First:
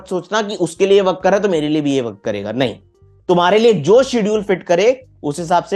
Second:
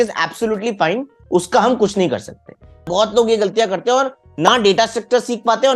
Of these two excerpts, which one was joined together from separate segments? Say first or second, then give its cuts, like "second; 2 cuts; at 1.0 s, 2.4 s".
second; 1 cut; at 2.8 s